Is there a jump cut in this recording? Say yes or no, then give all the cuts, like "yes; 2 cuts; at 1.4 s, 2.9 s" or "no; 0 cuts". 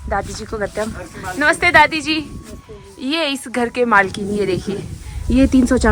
no; 0 cuts